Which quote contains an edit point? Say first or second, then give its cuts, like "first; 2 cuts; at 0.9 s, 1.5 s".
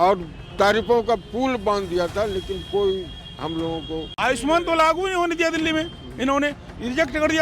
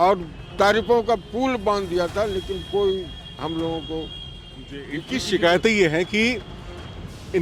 first; 1 cut; at 4.1 s